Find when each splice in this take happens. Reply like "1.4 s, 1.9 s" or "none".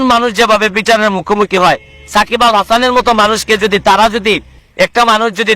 4.6 s

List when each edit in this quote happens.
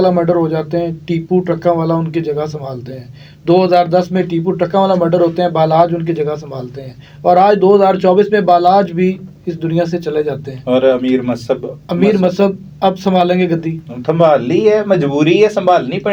none

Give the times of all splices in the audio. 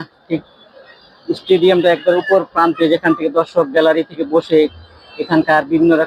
none

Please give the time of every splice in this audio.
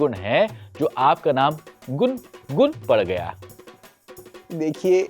none

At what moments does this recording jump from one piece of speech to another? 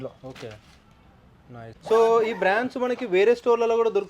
1.7 s

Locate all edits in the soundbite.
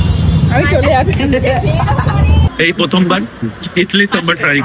2.5 s

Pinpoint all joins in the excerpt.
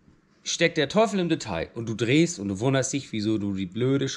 none

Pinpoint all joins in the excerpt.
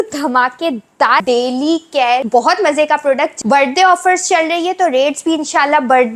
1.2 s, 2.3 s, 3.4 s

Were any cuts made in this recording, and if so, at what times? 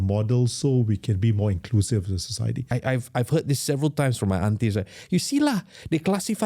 2.8 s

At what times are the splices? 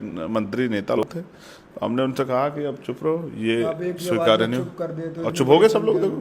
1.0 s

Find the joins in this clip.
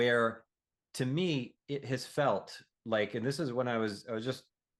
none

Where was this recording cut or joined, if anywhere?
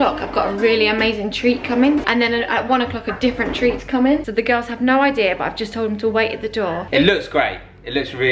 2.0 s, 4.2 s, 6.8 s

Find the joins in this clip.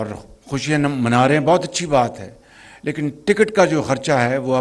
none

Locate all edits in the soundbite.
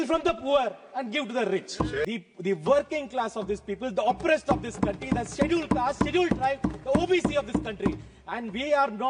2.1 s

